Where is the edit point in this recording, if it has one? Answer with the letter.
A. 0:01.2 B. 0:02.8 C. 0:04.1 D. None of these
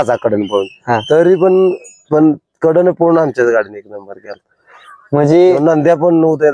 D